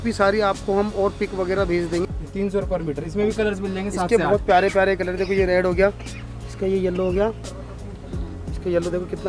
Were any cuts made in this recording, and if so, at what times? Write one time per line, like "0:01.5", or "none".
0:02.0